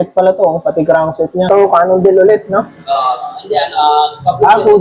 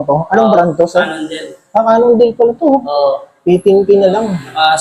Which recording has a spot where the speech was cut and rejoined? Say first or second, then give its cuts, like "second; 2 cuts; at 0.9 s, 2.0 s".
first; 1 cut; at 1.5 s